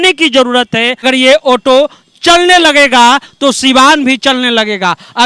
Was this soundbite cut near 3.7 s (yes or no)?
no